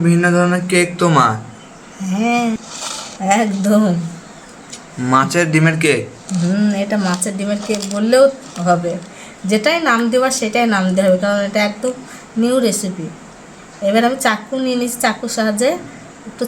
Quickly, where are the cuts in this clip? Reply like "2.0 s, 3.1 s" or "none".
2.6 s